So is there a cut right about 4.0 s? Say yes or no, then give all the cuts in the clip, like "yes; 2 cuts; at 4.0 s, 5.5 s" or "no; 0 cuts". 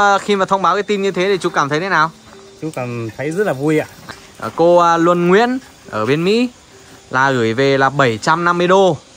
yes; 1 cut; at 4.0 s